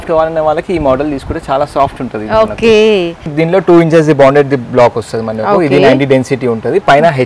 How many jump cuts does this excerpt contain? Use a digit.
1